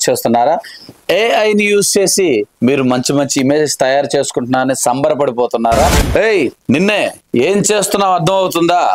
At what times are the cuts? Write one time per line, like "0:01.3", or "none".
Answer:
0:06.0